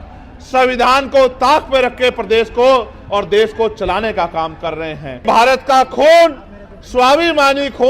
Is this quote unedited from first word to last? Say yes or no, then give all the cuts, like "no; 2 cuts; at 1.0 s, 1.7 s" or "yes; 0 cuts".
no; 1 cut; at 5.2 s